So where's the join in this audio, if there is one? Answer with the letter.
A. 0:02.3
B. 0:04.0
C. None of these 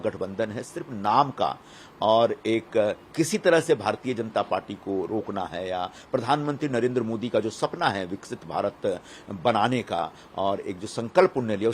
C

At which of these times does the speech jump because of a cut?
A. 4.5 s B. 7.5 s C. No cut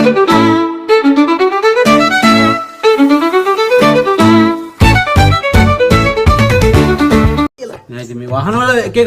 B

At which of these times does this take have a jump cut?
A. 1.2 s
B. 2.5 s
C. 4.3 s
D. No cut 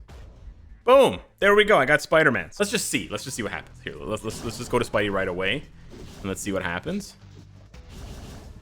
B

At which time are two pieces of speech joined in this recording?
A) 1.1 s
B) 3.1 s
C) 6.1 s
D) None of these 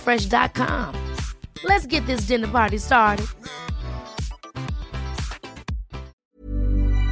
C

